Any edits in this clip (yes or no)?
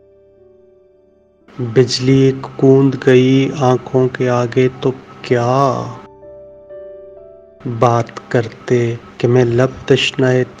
yes